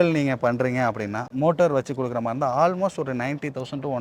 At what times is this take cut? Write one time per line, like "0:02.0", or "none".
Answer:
0:01.3

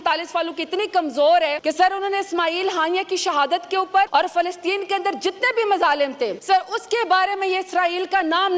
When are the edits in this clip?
0:01.6
0:04.1
0:06.4

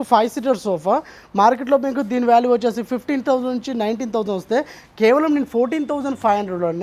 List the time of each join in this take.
none

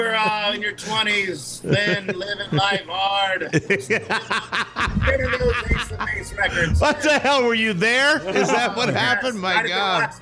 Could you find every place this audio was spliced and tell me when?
none

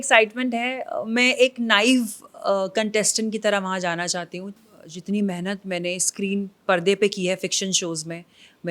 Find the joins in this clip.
0:04.4

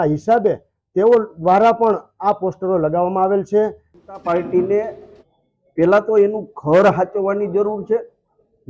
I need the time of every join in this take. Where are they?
0:03.9

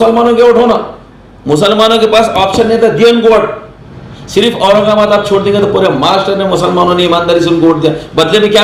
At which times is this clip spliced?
none

